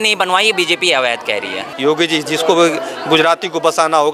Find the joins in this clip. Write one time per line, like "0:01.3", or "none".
0:01.6